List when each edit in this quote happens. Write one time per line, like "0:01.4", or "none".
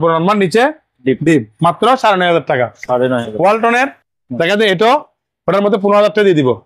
none